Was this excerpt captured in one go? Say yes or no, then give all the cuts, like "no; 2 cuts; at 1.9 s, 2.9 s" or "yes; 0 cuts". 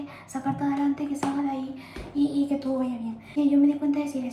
no; 1 cut; at 3.2 s